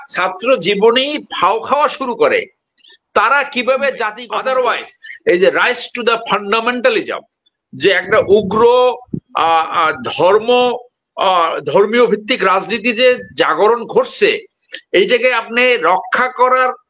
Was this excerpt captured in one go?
no; 1 cut; at 4.2 s

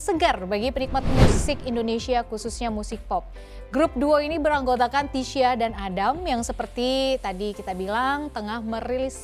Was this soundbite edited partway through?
no; 0 cuts

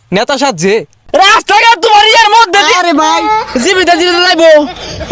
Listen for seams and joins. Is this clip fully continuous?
no; 1 cut; at 0.9 s

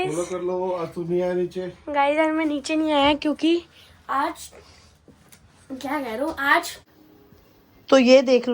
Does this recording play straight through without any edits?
no; 1 cut; at 7.1 s

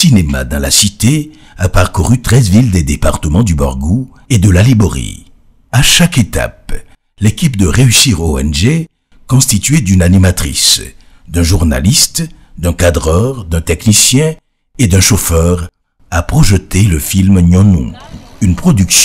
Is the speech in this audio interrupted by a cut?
yes; 1 cut; at 6.6 s

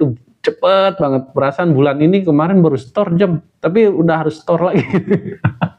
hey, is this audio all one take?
yes; 0 cuts

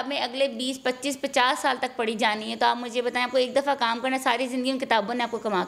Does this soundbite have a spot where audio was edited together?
no; 0 cuts

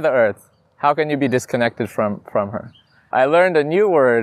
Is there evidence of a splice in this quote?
yes; 1 cut; at 3.0 s

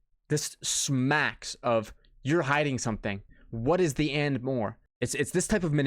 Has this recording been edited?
yes; 1 cut; at 4.8 s

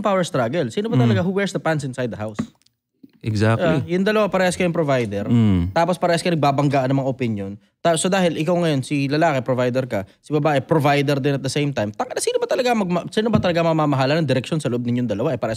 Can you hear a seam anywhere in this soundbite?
no; 0 cuts

